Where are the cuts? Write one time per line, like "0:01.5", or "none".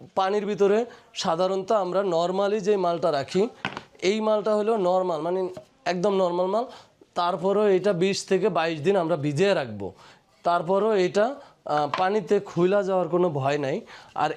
none